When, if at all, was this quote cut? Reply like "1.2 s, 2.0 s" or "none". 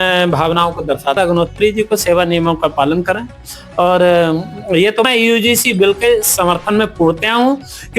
1.2 s, 5.1 s